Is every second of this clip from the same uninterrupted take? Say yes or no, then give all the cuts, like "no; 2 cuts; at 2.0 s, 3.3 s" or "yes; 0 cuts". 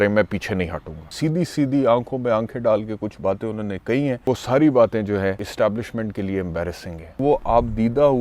no; 4 cuts; at 1.1 s, 4.3 s, 5.5 s, 7.2 s